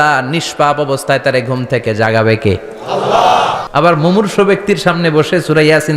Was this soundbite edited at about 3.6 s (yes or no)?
yes